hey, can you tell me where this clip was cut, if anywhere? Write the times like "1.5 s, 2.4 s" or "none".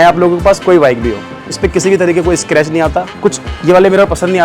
1.5 s, 3.1 s